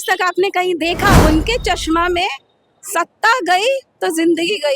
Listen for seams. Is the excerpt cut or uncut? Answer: cut